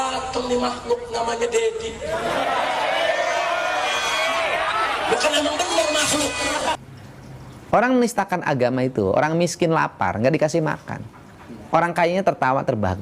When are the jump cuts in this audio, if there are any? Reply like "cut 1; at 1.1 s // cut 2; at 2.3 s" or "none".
cut 1; at 6.8 s